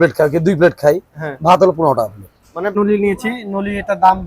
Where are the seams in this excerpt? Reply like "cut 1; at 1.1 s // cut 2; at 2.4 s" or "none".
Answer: cut 1; at 2.7 s